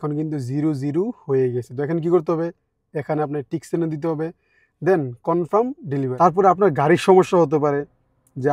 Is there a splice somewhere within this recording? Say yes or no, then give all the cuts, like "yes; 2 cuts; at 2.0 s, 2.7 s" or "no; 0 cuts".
yes; 1 cut; at 6.1 s